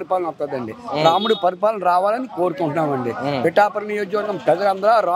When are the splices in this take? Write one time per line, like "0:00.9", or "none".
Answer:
none